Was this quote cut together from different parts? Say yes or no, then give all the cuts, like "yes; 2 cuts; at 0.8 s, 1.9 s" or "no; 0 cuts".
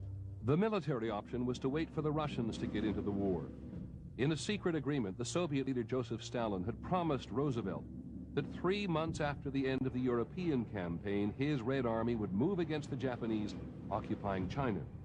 no; 0 cuts